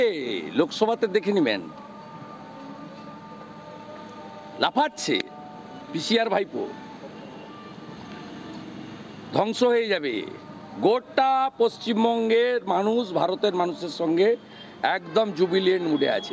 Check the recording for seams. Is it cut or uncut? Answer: uncut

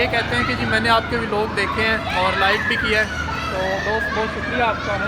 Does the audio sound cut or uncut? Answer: uncut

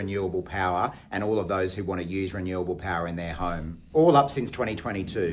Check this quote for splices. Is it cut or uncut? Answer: cut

